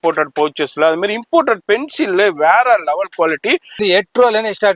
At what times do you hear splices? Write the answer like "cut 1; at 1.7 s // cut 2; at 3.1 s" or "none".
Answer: cut 1; at 3.8 s